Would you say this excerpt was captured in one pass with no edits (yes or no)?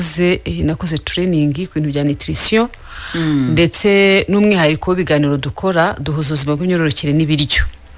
yes